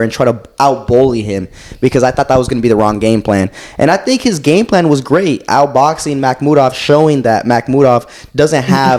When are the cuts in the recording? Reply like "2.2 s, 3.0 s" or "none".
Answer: none